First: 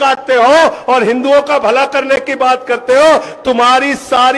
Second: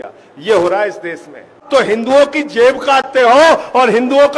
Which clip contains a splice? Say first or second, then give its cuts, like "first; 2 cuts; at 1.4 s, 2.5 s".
second; 1 cut; at 1.6 s